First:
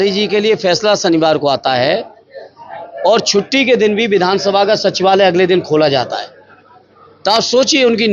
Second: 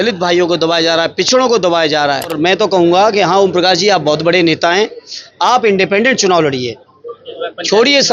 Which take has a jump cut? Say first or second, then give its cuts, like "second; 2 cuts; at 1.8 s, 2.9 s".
second; 1 cut; at 2.3 s